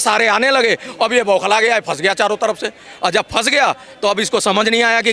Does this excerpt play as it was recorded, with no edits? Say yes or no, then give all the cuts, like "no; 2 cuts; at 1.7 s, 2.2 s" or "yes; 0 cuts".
yes; 0 cuts